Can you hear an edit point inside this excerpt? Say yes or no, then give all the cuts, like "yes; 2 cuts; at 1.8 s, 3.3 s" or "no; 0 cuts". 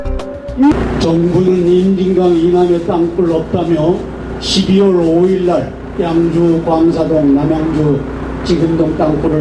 no; 0 cuts